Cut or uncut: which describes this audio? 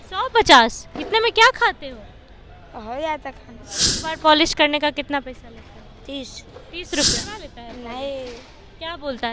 cut